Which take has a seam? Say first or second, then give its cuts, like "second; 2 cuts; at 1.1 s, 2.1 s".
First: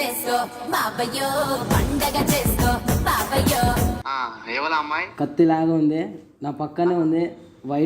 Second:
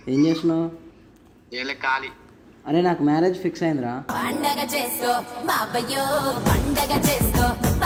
first; 1 cut; at 4.0 s